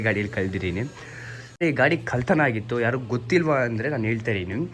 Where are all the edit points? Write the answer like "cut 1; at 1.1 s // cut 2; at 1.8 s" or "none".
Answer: cut 1; at 1.6 s